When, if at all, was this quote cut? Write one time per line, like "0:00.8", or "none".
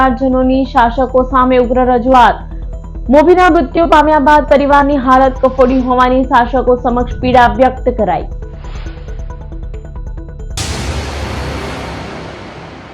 0:10.6